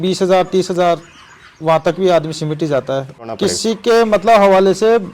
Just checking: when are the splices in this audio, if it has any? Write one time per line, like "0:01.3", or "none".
0:03.3